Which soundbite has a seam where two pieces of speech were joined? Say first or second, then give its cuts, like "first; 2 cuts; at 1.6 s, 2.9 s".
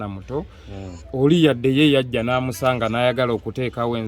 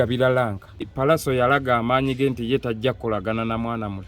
second; 1 cut; at 0.9 s